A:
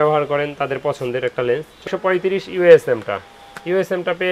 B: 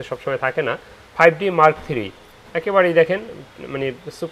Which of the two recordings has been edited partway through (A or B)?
A